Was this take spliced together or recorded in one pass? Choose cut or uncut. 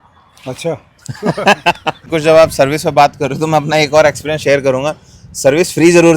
cut